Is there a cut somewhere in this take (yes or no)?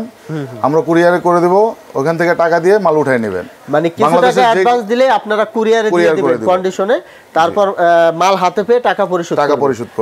no